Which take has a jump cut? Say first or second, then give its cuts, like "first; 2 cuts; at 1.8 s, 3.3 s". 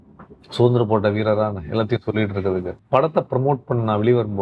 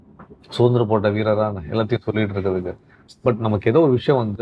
first; 1 cut; at 2.8 s